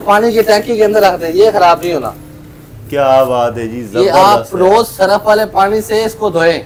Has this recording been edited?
no; 0 cuts

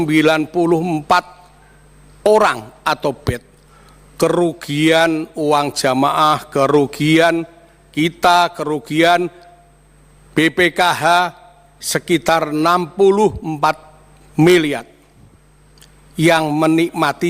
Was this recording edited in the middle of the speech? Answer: no; 0 cuts

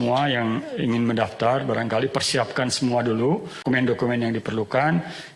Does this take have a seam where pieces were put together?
yes; 1 cut; at 3.6 s

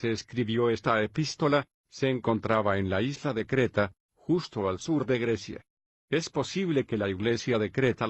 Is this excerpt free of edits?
no; 1 cut; at 3.2 s

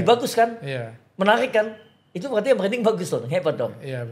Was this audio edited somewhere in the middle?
no; 0 cuts

